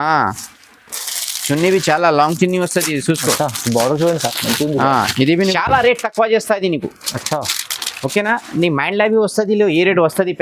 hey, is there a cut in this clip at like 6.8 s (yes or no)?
no